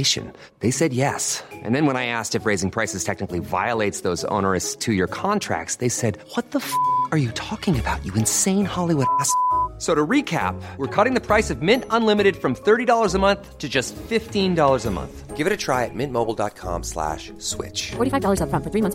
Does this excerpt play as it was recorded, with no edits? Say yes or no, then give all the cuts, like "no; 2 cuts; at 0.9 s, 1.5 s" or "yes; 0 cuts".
yes; 0 cuts